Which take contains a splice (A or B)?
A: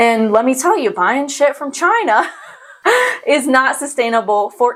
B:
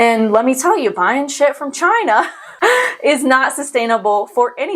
B